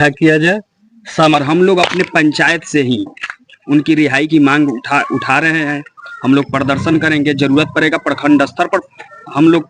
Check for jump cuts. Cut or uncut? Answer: cut